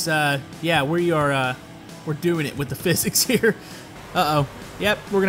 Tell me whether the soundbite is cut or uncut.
cut